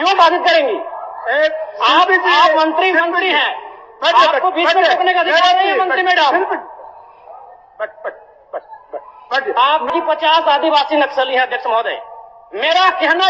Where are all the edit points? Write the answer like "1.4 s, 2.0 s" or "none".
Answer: 9.9 s